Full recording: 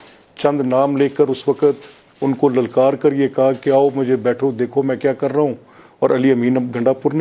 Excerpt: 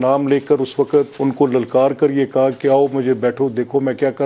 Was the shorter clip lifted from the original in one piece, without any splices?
no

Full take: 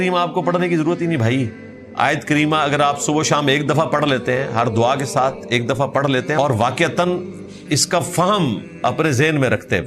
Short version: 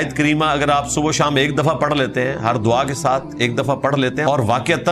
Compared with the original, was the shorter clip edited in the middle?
no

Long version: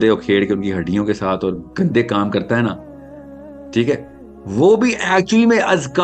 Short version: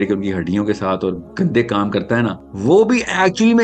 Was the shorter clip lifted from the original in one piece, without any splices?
no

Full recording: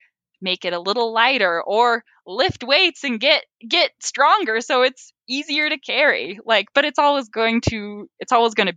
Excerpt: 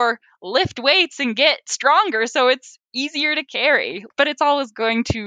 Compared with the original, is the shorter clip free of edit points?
no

